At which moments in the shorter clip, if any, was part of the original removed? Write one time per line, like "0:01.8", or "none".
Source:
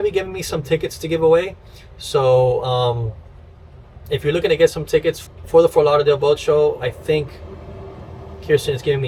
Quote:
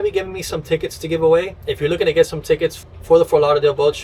0:01.6